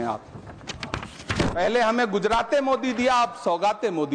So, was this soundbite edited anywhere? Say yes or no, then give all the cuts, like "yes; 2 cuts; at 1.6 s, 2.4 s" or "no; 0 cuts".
no; 0 cuts